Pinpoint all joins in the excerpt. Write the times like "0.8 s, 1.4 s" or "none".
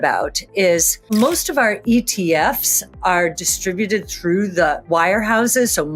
1.1 s, 4.8 s